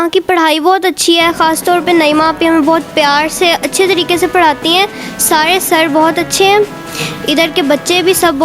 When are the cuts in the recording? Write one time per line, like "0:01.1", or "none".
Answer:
none